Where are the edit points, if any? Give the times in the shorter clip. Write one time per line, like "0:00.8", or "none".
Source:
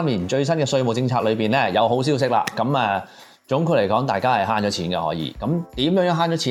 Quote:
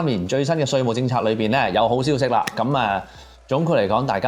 none